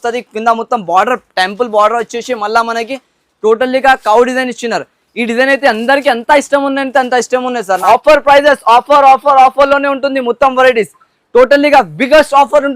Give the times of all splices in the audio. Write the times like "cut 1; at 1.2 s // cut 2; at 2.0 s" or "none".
cut 1; at 7.8 s